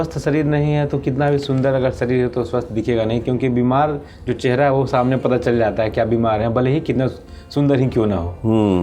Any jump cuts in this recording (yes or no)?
no